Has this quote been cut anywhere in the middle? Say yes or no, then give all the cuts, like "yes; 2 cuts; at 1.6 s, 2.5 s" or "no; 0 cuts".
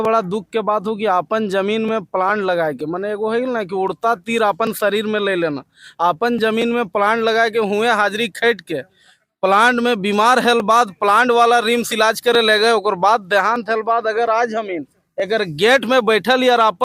no; 0 cuts